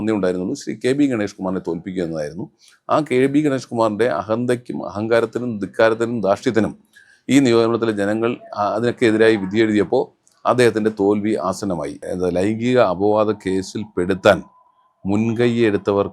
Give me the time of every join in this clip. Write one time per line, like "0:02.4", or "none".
0:12.0